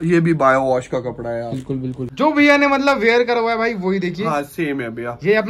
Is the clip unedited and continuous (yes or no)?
no